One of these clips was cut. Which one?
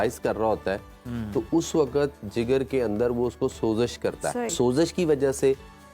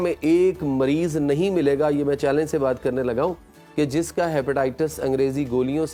first; 1 cut; at 4.5 s

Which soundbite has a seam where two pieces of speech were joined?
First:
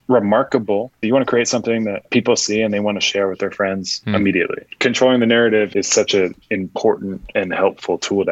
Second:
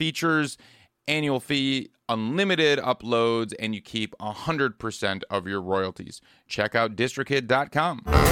first; 6 cuts; at 0.9 s, 2.1 s, 3.9 s, 4.7 s, 5.7 s, 7.2 s

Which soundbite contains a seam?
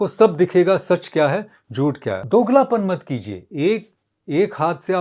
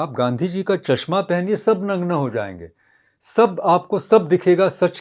first; 1 cut; at 2.2 s

